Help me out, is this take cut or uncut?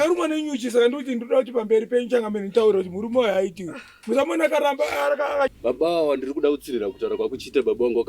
cut